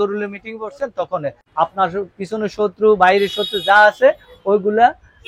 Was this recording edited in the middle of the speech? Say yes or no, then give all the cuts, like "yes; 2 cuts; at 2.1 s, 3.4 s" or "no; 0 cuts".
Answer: yes; 1 cut; at 1.4 s